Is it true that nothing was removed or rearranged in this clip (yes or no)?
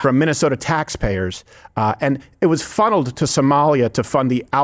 yes